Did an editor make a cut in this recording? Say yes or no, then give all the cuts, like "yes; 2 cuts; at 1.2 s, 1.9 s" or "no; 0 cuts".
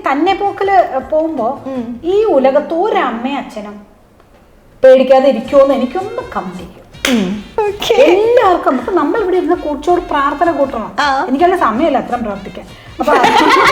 yes; 1 cut; at 7.4 s